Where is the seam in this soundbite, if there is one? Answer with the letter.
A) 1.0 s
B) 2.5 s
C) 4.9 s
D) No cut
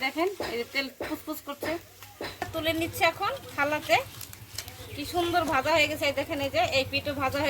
B